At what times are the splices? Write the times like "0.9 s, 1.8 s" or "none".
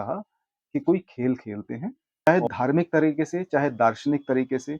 2.3 s